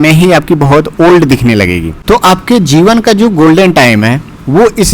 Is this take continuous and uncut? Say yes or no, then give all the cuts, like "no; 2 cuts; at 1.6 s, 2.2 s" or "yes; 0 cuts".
no; 1 cut; at 1.9 s